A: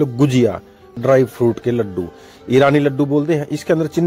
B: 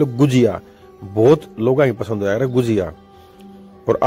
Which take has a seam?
A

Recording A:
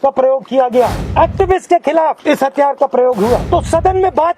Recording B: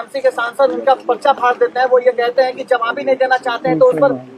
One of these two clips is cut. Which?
A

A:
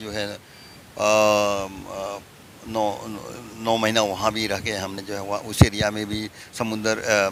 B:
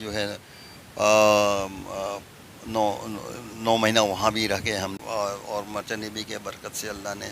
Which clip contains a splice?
B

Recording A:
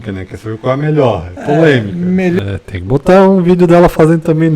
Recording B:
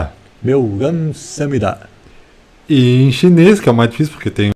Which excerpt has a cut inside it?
A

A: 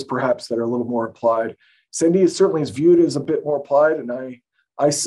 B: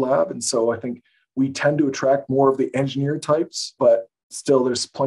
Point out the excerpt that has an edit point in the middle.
B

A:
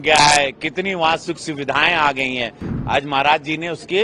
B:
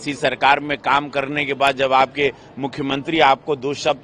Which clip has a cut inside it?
A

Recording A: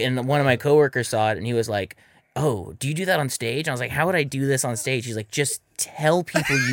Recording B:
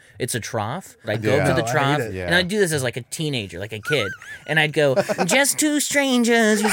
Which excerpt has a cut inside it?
B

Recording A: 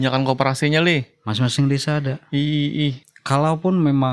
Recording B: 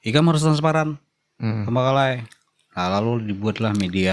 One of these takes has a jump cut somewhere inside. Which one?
A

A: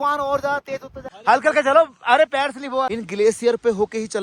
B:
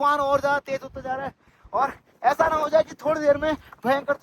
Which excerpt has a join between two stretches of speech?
A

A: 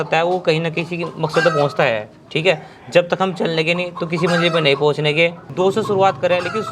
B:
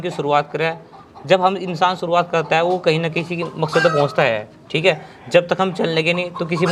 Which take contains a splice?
A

